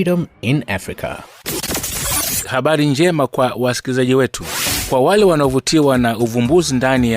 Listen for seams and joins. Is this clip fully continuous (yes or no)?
no